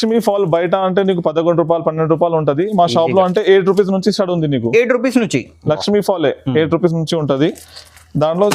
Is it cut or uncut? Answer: uncut